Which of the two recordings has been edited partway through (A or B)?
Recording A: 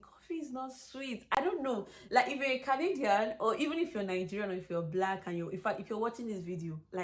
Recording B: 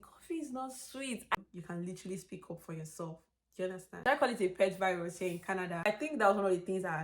B